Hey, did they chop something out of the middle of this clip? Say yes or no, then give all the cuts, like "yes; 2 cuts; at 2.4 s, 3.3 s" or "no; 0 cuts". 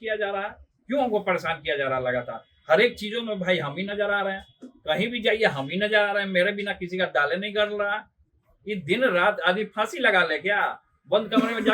no; 0 cuts